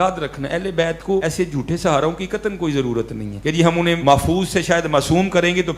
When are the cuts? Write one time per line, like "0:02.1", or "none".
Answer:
0:01.2
0:03.7